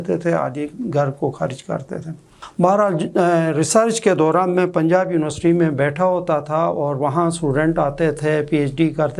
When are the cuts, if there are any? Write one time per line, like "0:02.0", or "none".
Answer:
none